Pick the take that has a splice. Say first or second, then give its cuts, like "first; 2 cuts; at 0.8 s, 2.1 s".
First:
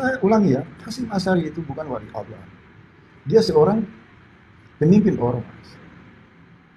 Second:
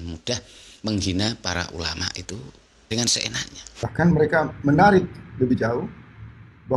second; 1 cut; at 3.8 s